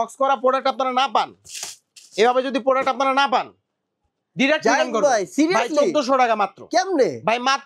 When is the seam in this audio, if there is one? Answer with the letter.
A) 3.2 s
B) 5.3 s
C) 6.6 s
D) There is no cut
D